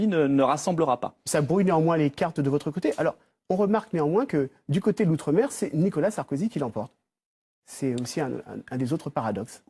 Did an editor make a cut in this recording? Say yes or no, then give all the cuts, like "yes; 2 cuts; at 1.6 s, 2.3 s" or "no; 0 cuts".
yes; 1 cut; at 1.1 s